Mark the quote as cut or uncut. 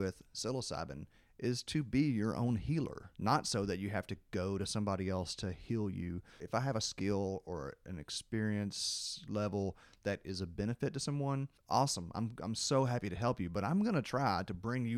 cut